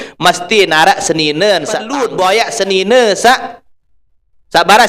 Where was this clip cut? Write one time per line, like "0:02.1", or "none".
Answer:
0:02.0